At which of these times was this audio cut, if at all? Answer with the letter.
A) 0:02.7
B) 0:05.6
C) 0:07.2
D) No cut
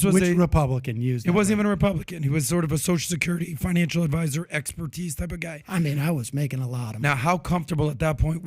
B